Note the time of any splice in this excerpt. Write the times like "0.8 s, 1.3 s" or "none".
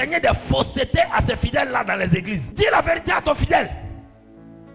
2.5 s